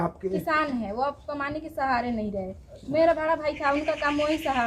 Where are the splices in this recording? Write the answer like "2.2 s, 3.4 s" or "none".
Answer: none